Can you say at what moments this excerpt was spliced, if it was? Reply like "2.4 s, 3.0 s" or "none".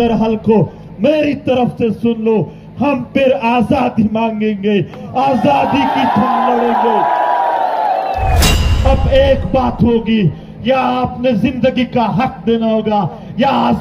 8.7 s